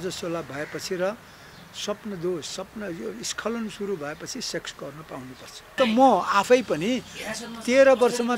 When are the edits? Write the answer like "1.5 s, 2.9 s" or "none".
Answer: 5.8 s